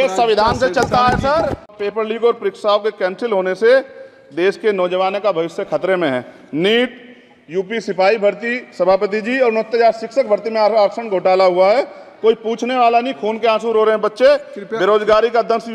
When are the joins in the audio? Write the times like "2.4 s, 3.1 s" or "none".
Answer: 1.7 s